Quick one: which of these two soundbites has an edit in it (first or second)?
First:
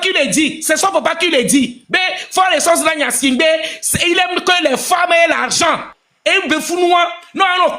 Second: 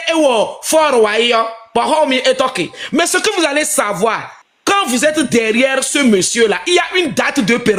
first